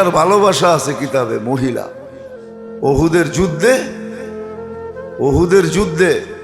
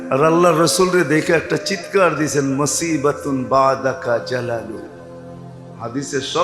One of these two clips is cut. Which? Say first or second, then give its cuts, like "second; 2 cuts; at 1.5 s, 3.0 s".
first; 2 cuts; at 3.9 s, 5.2 s